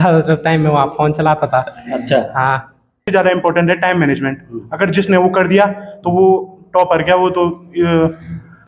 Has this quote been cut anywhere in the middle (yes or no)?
yes